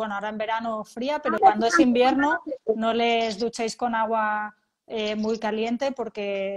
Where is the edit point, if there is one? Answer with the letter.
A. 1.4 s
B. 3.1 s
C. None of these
A